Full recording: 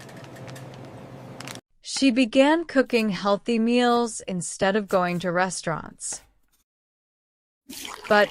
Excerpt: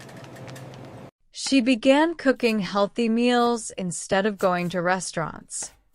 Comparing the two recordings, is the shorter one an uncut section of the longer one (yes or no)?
no